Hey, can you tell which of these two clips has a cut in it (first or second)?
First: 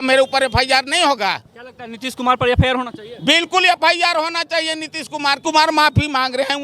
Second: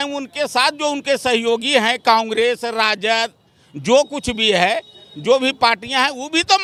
first